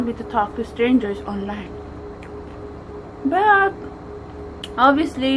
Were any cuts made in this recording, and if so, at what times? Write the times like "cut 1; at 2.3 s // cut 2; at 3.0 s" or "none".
none